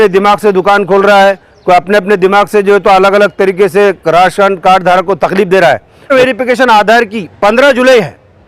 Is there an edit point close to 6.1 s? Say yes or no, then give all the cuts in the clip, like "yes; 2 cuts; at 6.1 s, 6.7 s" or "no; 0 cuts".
yes; 1 cut; at 6.1 s